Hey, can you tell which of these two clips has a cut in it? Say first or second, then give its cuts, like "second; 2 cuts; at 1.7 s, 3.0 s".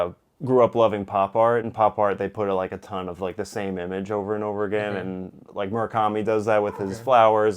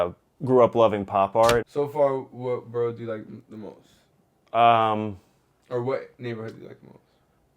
second; 1 cut; at 1.7 s